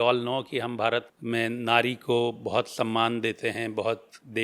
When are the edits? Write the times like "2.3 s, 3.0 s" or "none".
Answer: 1.1 s

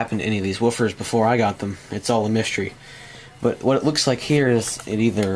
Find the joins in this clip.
3.6 s

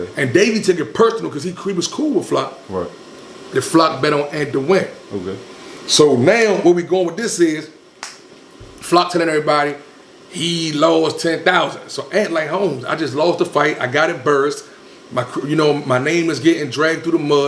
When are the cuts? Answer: none

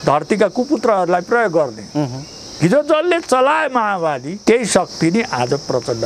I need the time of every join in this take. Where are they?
4.3 s

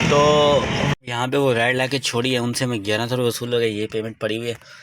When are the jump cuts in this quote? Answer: 0.9 s

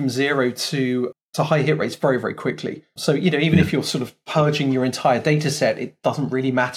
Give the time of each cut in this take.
1.1 s, 3.0 s

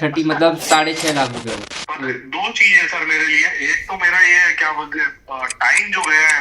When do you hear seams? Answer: 1.6 s

